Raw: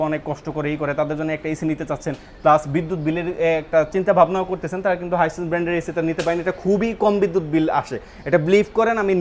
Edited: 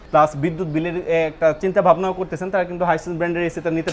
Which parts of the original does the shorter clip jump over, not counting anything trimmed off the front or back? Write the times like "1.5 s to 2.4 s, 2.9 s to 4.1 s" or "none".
none